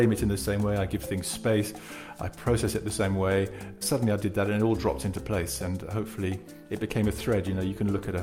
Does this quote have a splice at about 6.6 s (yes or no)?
yes